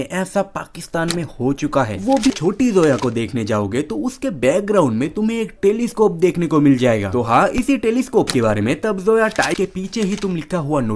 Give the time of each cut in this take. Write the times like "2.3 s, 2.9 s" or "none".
2.3 s, 9.5 s